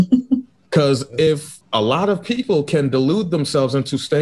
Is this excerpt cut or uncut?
cut